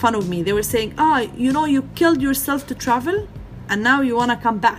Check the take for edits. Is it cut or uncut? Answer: uncut